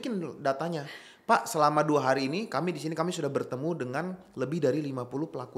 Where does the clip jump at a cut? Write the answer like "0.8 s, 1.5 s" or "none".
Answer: none